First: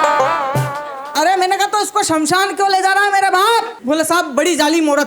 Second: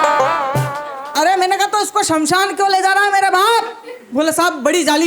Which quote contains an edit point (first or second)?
first